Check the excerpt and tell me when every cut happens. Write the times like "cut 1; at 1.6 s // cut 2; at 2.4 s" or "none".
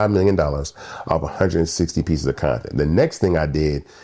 none